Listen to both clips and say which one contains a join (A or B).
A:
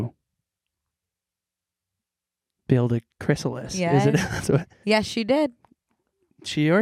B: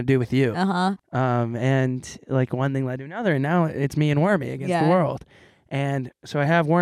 B